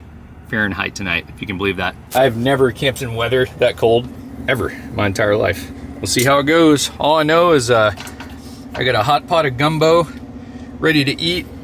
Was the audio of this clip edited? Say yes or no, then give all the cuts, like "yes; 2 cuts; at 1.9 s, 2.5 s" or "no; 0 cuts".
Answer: no; 0 cuts